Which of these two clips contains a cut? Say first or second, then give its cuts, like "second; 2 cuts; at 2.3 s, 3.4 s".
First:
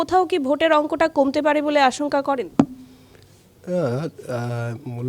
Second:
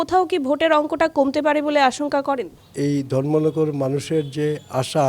second; 1 cut; at 2.5 s